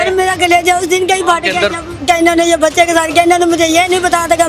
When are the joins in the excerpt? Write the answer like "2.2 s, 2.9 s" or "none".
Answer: 1.9 s